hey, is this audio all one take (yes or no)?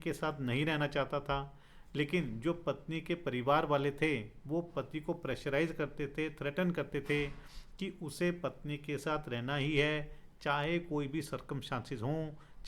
yes